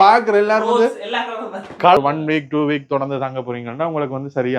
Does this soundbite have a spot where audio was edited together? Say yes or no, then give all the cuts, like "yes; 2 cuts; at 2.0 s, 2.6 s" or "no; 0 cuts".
yes; 1 cut; at 2.0 s